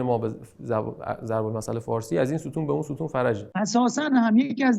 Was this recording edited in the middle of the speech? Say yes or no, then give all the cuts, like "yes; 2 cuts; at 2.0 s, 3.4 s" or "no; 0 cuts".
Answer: yes; 1 cut; at 3.4 s